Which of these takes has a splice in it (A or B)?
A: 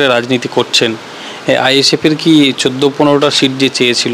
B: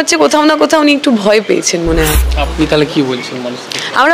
B